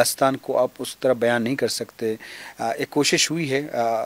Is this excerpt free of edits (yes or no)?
yes